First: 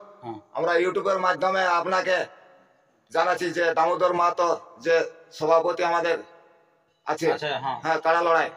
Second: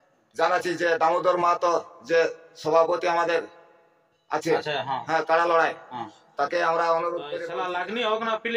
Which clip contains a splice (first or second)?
second